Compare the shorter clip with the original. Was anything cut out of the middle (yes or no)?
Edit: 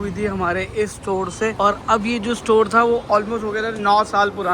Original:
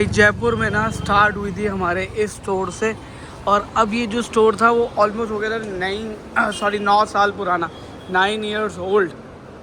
yes